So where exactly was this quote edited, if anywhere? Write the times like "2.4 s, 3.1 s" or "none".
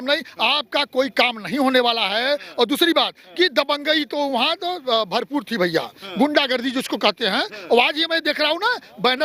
none